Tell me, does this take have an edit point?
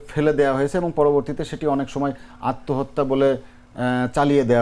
no; 0 cuts

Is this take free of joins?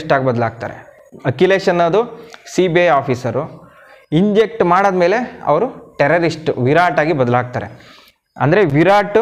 yes; 0 cuts

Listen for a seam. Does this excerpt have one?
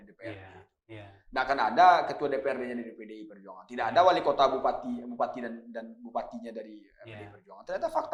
no; 0 cuts

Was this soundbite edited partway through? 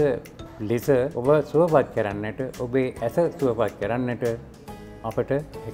yes; 1 cut; at 1.1 s

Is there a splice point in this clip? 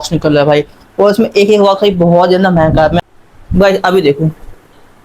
yes; 1 cut; at 3.1 s

